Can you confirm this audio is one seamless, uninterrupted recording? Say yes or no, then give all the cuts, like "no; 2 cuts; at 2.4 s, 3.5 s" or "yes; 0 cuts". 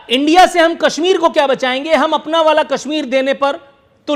yes; 0 cuts